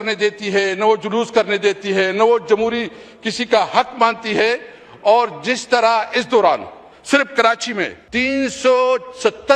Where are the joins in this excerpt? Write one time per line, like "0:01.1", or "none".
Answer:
0:08.0

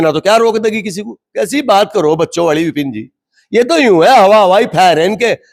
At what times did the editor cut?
none

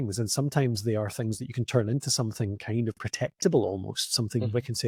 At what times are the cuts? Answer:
none

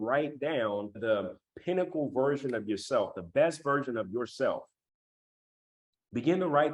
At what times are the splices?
0:01.0

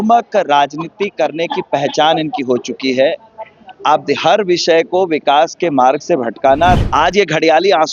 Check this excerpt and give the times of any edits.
0:06.8

